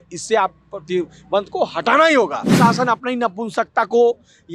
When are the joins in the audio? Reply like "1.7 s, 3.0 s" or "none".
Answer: 2.6 s